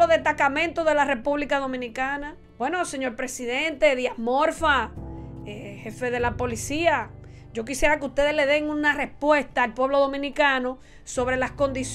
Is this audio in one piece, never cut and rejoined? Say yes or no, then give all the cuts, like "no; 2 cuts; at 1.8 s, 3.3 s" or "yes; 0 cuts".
no; 1 cut; at 2.4 s